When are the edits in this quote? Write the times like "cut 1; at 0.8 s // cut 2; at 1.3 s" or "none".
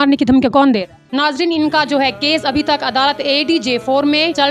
cut 1; at 1.1 s